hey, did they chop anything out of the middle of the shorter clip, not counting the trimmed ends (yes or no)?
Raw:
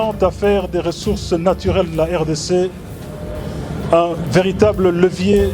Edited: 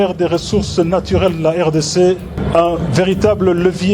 yes